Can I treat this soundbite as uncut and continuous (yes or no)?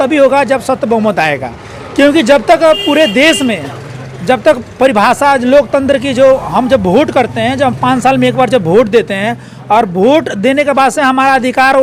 yes